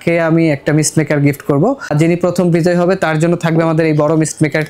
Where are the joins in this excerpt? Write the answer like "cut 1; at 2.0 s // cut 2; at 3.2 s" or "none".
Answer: cut 1; at 1.9 s